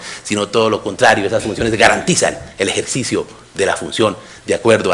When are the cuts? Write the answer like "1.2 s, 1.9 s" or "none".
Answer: 3.0 s